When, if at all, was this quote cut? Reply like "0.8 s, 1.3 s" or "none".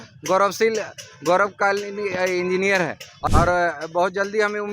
3.1 s